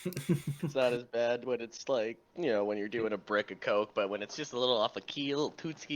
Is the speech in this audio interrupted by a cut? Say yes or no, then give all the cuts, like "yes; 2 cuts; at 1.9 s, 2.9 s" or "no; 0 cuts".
yes; 2 cuts; at 0.7 s, 2.2 s